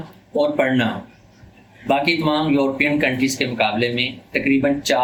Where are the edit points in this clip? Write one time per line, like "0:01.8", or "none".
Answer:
none